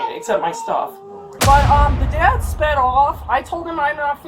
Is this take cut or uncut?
cut